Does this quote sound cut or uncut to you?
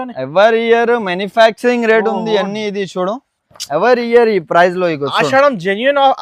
uncut